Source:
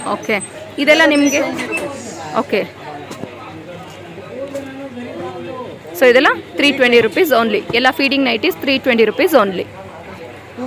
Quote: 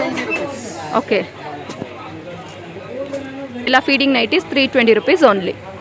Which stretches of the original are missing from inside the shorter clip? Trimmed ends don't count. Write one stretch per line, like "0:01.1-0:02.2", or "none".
0:05.1-0:07.8